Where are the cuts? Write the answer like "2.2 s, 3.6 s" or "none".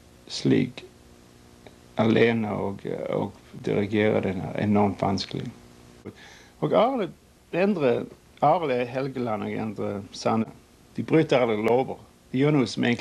6.1 s, 10.5 s